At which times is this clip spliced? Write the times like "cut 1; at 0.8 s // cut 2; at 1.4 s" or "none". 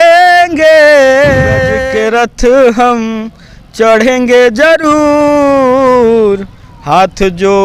cut 1; at 1.8 s